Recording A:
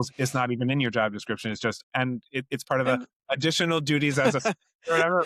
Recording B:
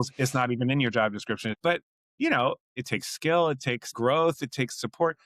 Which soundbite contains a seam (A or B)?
B